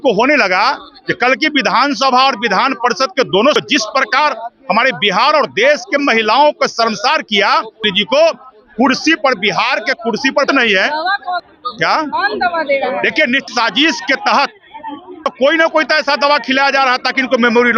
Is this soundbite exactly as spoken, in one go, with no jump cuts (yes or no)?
yes